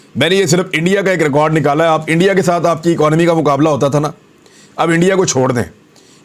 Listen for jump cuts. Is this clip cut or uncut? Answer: uncut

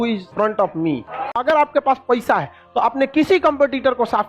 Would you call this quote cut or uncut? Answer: cut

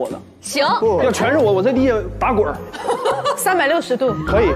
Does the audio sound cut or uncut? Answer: cut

